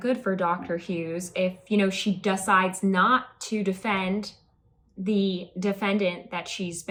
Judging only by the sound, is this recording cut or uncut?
uncut